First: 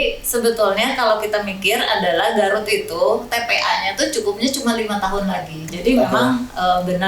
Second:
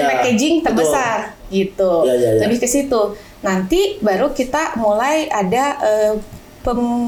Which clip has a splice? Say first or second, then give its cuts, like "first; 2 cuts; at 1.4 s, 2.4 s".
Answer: first; 1 cut; at 5.7 s